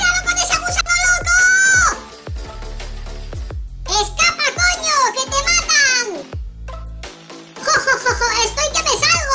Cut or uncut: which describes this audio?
cut